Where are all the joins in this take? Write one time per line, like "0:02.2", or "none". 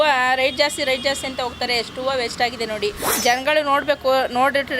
0:03.1